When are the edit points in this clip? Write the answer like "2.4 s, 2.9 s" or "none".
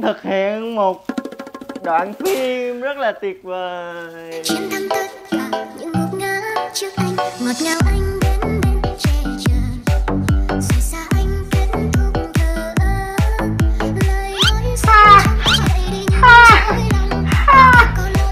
none